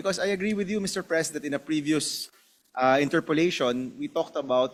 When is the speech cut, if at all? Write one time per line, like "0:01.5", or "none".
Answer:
none